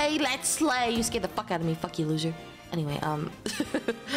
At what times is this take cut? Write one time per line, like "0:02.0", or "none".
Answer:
none